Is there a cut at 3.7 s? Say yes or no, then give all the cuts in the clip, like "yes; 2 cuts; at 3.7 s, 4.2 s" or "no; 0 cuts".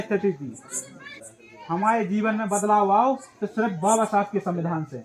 no; 1 cut; at 1.2 s